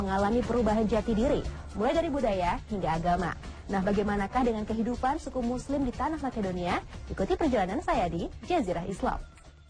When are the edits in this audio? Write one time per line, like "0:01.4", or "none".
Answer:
none